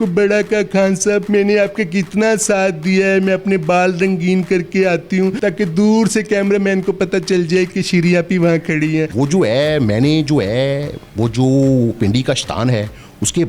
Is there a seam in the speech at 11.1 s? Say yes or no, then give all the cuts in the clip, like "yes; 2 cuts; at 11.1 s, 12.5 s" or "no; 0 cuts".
no; 3 cuts; at 1.2 s, 5.4 s, 9.1 s